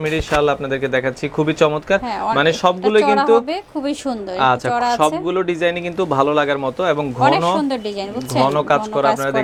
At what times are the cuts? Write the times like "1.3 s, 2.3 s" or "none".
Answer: none